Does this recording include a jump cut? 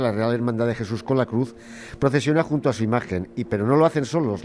no; 0 cuts

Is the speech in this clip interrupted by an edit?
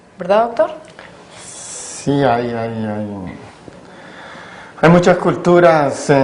no; 0 cuts

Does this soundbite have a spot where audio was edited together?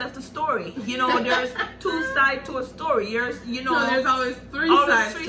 no; 0 cuts

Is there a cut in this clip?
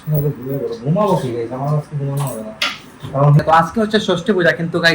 yes; 1 cut; at 3.4 s

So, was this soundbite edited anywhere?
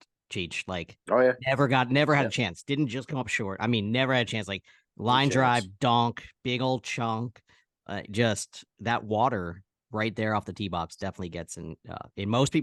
no; 0 cuts

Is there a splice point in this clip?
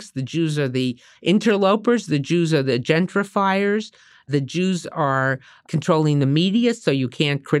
yes; 2 cuts; at 4.3 s, 5.7 s

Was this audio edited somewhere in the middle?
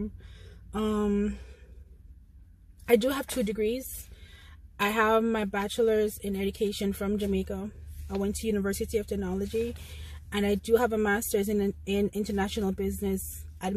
no; 0 cuts

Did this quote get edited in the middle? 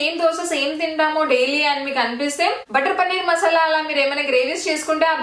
no; 0 cuts

